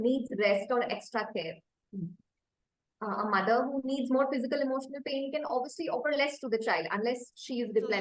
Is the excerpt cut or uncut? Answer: uncut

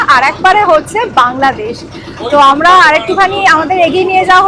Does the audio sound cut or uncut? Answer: uncut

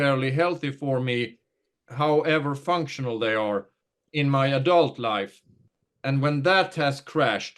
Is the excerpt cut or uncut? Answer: cut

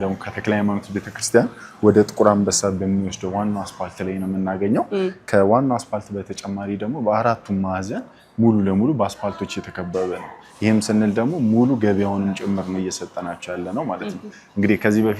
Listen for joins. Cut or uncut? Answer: uncut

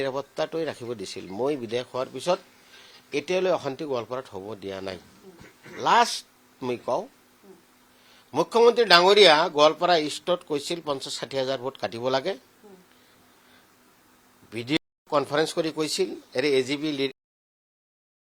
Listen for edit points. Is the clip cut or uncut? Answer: uncut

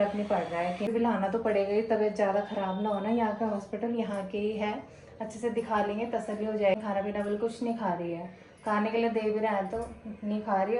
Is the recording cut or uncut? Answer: cut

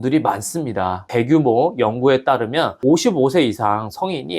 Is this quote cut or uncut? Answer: cut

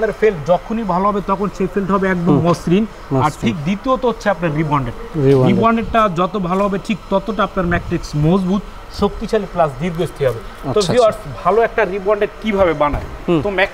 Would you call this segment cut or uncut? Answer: uncut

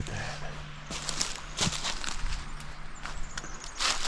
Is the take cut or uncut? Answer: uncut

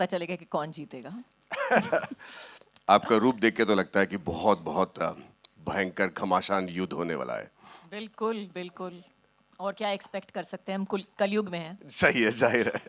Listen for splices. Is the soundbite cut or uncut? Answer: uncut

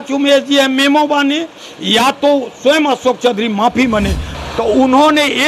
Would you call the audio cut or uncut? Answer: cut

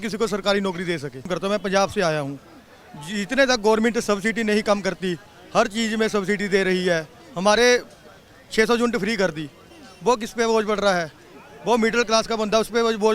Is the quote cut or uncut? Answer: cut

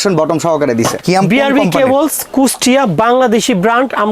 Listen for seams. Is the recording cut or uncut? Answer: cut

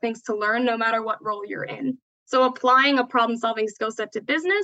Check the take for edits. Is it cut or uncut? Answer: cut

